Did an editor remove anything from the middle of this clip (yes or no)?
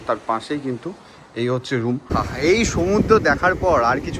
yes